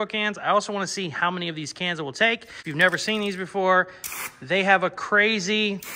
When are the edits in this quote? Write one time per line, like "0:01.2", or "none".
0:02.5